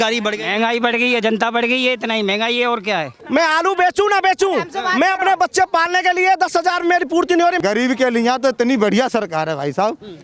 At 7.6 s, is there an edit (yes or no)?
yes